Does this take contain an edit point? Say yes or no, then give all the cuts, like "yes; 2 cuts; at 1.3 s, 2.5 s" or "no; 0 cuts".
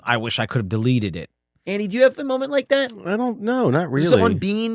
yes; 1 cut; at 1.7 s